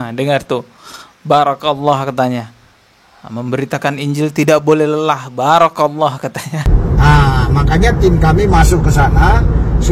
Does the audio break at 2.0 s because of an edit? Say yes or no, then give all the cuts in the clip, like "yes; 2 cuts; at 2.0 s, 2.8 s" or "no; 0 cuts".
no; 1 cut; at 6.6 s